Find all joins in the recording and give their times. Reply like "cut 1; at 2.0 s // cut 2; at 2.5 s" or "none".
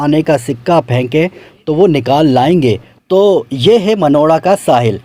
cut 1; at 3.0 s